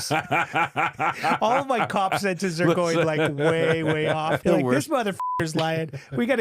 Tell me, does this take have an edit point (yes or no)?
yes